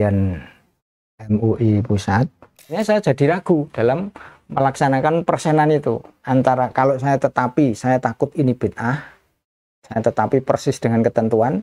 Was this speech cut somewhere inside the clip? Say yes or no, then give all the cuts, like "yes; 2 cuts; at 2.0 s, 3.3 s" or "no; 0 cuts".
yes; 1 cut; at 2.7 s